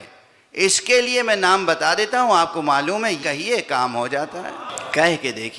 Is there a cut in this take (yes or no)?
yes